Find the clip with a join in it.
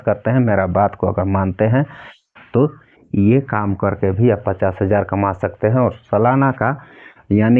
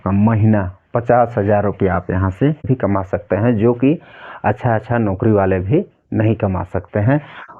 second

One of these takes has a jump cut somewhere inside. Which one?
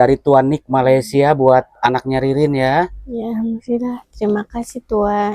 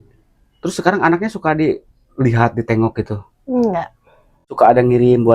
second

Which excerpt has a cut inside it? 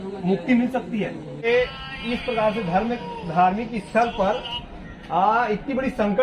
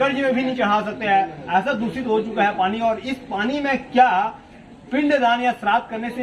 first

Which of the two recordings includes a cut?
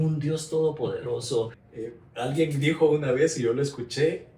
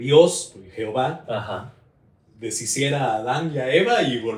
first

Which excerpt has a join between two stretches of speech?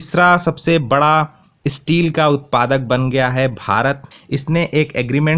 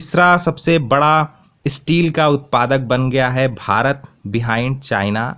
first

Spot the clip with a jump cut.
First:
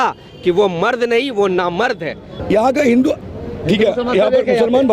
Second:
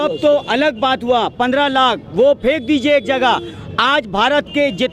first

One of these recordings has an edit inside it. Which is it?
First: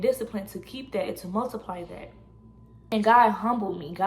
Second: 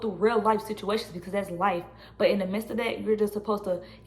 first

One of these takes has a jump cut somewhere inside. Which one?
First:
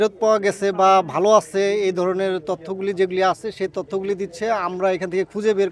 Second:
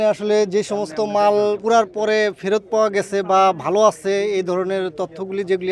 second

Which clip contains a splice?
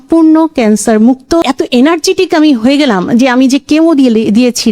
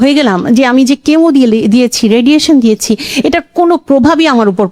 first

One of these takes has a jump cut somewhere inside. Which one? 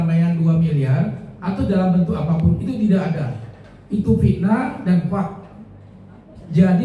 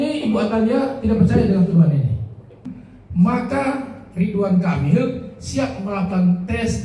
second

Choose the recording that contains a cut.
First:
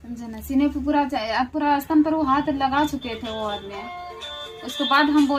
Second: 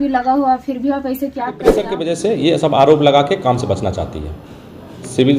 second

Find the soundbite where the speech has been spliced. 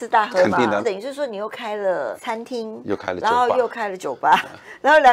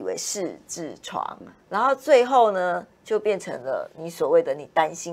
first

